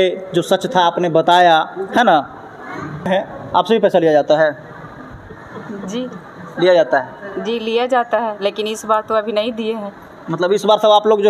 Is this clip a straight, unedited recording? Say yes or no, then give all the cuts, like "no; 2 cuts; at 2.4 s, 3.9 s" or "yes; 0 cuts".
no; 1 cut; at 3.1 s